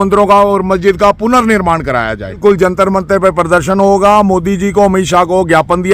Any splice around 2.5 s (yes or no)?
yes